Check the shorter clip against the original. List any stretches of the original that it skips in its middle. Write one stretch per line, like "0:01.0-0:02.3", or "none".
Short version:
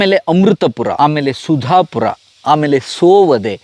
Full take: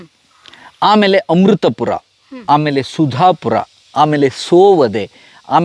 0:02.0-0:02.4

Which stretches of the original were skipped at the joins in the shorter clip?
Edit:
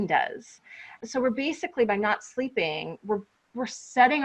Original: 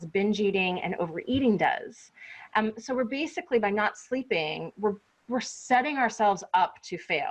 0:02.5-0:02.7

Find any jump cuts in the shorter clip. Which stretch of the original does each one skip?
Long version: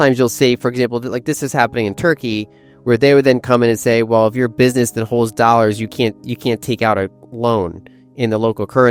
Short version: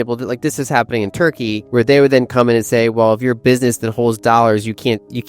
0:02.4-0:02.7

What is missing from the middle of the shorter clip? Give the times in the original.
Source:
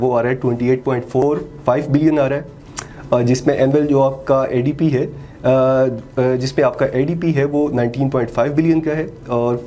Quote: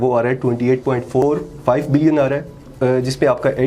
0:02.7-0:06.0

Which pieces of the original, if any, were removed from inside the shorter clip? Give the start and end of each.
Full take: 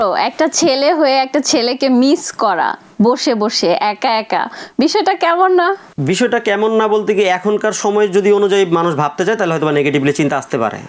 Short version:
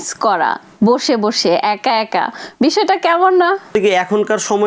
0:05.9-0:07.0

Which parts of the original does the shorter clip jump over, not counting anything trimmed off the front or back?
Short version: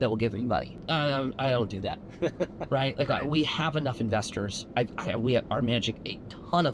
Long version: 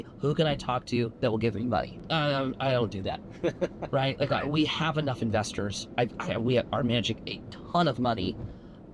none

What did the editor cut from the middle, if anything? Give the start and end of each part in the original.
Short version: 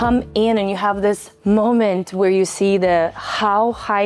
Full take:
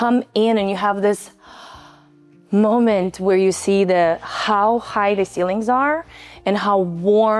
0:01.3-0:02.4

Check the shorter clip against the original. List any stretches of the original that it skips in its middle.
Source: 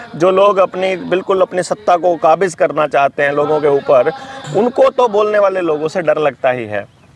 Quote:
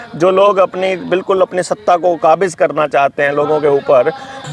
none

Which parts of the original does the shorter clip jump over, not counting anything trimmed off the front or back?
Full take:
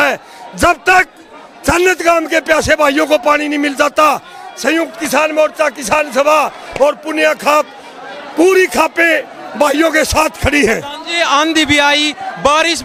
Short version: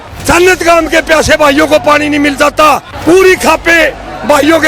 0:04.3-0:08.2

